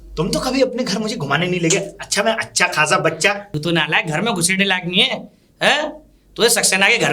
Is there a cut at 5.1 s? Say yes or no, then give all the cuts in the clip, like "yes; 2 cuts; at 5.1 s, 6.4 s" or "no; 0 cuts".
no; 1 cut; at 3.5 s